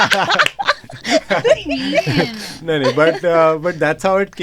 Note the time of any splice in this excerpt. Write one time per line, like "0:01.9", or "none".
none